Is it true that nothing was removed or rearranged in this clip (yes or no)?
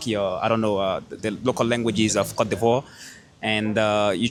yes